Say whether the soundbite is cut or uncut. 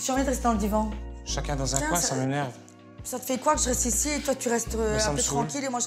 cut